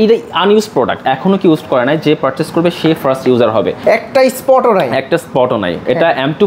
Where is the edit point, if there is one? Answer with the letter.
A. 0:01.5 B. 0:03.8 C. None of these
C